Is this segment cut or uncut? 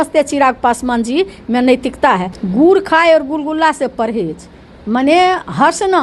cut